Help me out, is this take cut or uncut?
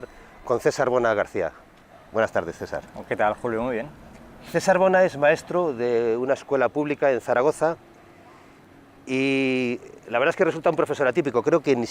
uncut